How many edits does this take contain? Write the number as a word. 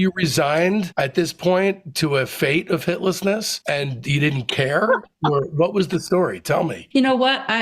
three